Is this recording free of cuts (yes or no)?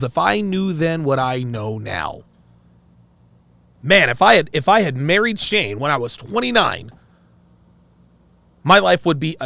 yes